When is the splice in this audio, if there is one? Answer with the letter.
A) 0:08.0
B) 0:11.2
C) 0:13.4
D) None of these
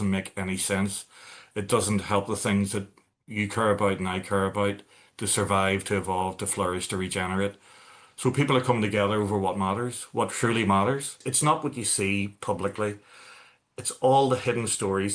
B